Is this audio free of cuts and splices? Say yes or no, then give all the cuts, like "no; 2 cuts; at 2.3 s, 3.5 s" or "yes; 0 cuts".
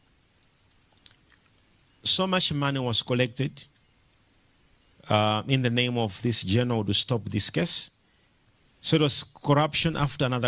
yes; 0 cuts